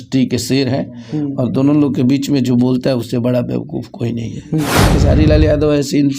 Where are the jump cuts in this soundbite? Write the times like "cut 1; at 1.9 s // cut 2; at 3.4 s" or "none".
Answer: cut 1; at 4.8 s